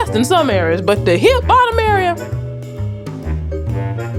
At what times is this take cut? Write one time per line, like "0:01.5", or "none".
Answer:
0:02.2